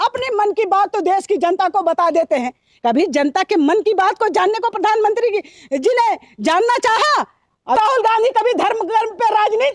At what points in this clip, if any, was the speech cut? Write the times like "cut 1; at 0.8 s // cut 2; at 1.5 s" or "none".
cut 1; at 7.8 s